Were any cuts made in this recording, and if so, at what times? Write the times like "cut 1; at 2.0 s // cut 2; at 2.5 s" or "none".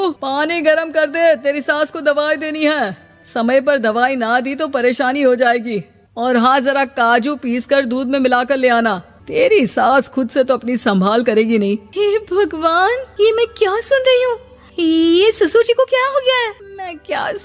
none